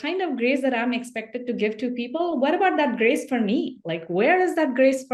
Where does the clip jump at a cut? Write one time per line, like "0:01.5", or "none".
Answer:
none

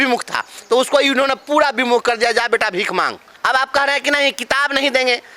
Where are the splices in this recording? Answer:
0:03.3

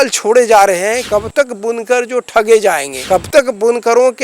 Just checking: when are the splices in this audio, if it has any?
0:01.0

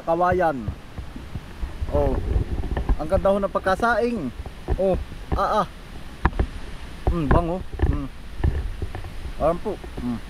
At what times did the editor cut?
none

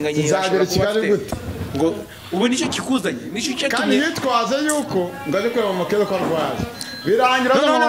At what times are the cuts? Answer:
none

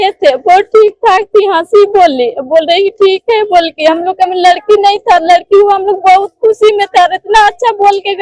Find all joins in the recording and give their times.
none

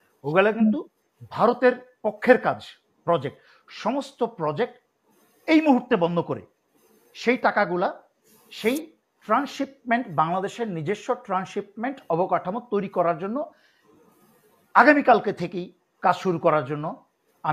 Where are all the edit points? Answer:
none

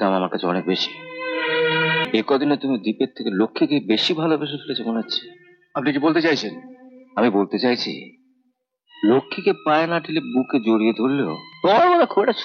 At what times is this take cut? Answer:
0:02.1
0:11.4

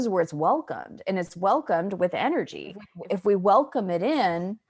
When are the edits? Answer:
0:02.9

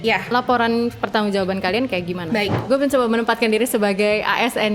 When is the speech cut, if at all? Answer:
0:02.6

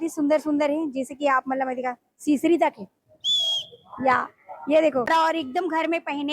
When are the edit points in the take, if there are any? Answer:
0:05.1

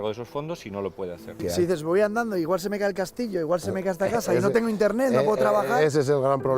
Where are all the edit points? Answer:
0:01.4

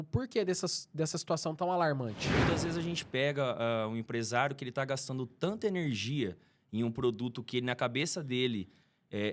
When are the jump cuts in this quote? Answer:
0:02.2

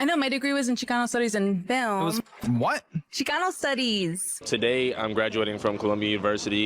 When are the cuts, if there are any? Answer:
0:04.4

